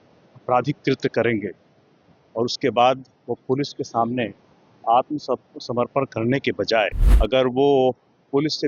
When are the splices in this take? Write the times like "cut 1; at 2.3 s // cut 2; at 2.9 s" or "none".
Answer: cut 1; at 7.1 s